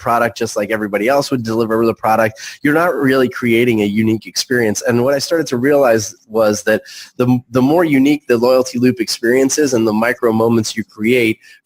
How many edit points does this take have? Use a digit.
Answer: 0